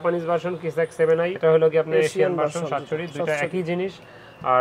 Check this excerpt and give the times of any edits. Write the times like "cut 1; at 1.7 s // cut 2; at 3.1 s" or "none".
none